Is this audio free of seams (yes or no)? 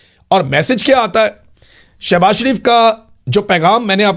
yes